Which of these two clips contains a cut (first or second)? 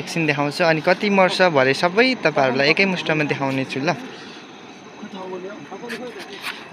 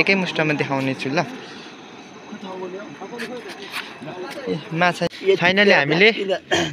second